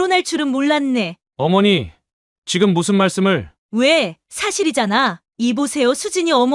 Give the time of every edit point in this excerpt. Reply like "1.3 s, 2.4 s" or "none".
3.6 s